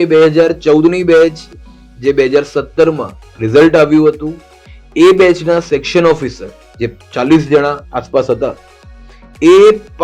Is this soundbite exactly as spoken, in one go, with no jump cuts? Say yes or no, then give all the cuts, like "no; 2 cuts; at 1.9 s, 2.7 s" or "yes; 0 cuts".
yes; 0 cuts